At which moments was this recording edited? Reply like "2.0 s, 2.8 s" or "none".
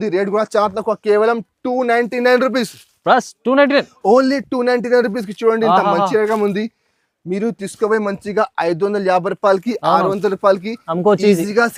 none